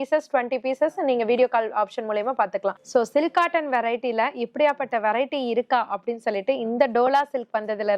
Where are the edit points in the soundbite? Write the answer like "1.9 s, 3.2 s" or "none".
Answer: 2.8 s